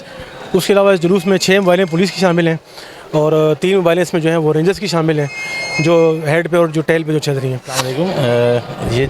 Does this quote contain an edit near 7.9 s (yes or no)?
yes